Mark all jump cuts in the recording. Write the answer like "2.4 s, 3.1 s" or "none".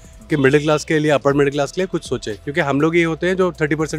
2.4 s